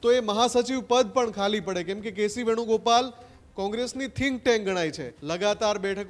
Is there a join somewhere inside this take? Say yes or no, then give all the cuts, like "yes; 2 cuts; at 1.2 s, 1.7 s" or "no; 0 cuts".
yes; 1 cut; at 5.1 s